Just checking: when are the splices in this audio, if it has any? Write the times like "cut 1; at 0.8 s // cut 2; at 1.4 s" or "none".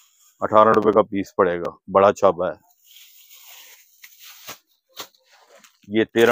none